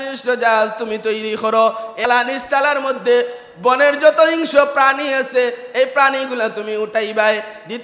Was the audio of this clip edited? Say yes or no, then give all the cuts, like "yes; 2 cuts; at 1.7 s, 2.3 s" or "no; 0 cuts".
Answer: yes; 1 cut; at 2.1 s